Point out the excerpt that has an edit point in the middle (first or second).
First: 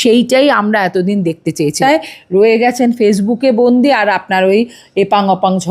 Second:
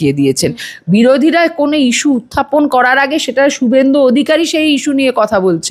first